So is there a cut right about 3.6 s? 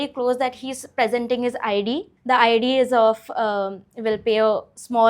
no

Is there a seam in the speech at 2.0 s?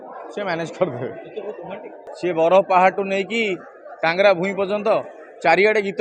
yes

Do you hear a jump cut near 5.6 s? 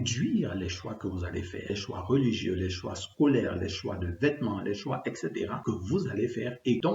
yes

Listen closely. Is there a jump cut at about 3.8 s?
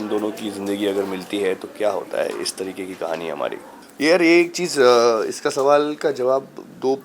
yes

